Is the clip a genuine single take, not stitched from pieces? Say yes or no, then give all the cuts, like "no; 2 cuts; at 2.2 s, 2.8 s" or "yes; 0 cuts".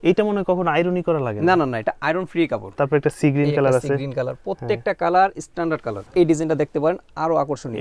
no; 2 cuts; at 2.7 s, 6.0 s